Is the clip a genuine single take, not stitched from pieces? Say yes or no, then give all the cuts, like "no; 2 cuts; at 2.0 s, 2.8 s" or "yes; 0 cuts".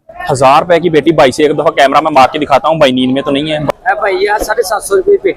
no; 1 cut; at 3.6 s